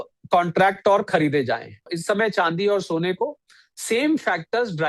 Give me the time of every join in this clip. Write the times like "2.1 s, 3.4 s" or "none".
1.9 s